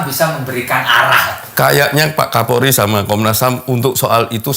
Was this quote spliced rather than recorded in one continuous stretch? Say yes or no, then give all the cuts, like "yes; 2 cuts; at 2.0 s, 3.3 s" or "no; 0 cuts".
yes; 1 cut; at 1.4 s